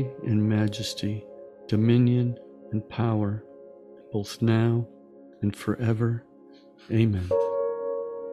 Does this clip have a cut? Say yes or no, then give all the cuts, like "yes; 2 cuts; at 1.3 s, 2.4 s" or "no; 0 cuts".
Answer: yes; 1 cut; at 7.2 s